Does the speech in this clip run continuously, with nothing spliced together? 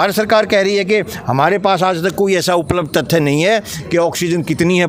yes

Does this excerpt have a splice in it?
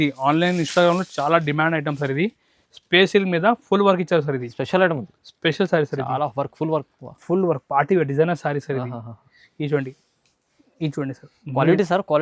no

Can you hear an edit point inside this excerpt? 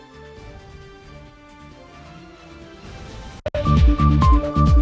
yes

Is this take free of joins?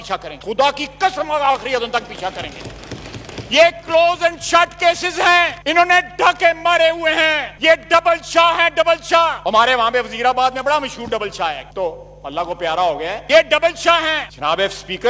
yes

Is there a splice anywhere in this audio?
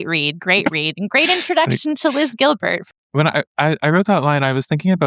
yes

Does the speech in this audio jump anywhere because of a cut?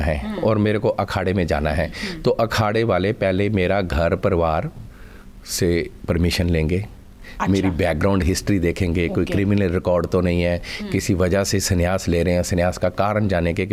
no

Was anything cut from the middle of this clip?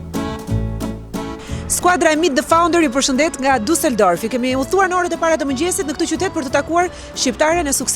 yes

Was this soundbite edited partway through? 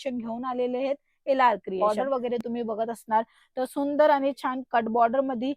yes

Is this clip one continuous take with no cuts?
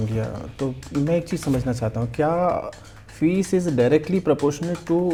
yes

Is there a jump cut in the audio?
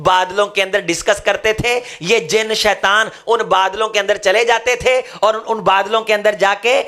no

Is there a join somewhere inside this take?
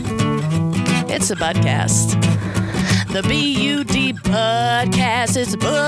no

